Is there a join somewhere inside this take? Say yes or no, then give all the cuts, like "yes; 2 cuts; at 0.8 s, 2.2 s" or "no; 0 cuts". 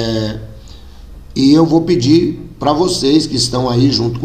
no; 0 cuts